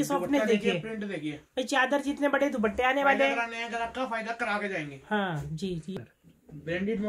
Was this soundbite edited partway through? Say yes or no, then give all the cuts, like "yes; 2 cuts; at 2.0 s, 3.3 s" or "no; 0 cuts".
yes; 1 cut; at 5.9 s